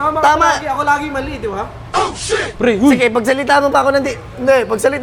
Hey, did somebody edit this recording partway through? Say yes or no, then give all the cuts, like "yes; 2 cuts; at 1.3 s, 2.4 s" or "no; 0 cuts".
no; 0 cuts